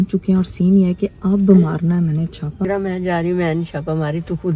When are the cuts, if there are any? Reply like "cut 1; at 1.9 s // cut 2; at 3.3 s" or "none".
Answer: cut 1; at 2.6 s